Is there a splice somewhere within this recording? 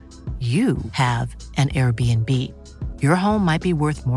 no; 0 cuts

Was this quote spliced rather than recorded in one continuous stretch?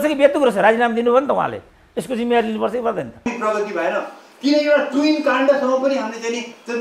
yes; 1 cut; at 3.3 s

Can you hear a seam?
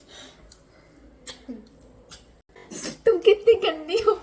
yes; 1 cut; at 2.7 s

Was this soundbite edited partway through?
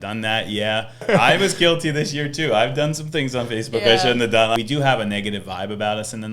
yes; 2 cuts; at 1.0 s, 4.6 s

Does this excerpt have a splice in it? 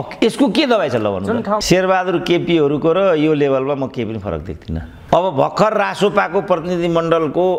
yes; 2 cuts; at 1.6 s, 4.9 s

